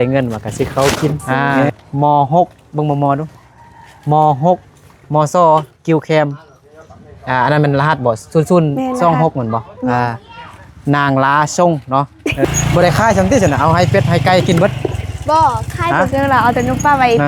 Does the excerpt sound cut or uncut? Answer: cut